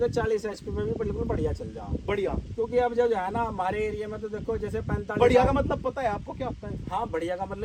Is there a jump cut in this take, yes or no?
no